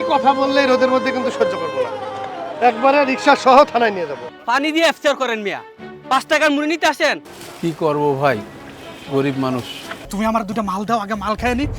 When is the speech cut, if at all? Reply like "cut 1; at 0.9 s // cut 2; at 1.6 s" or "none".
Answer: cut 1; at 4.3 s // cut 2; at 7.3 s // cut 3; at 10.0 s